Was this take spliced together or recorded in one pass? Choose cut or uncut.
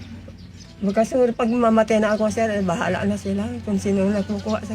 uncut